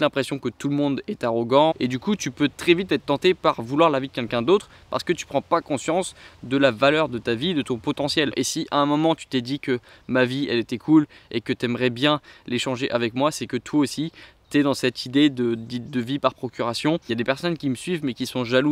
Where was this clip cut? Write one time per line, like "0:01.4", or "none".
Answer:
0:01.7
0:08.3
0:17.1